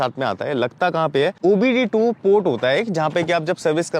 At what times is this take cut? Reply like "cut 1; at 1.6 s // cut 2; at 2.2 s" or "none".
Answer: cut 1; at 1.4 s